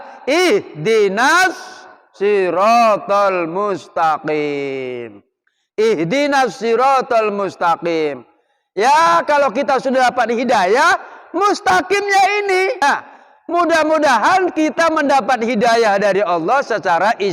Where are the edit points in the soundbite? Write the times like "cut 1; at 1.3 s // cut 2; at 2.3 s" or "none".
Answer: cut 1; at 12.8 s

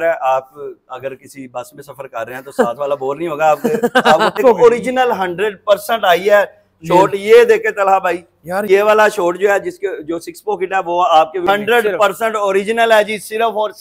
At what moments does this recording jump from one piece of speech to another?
cut 1; at 4.3 s // cut 2; at 8.7 s // cut 3; at 11.4 s

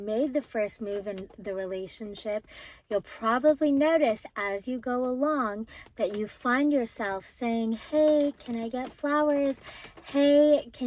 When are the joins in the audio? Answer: none

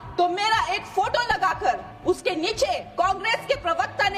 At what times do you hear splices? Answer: cut 1; at 1.9 s // cut 2; at 2.9 s

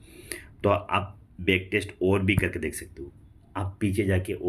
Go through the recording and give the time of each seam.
none

